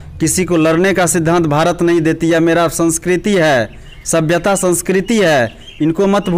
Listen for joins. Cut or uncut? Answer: uncut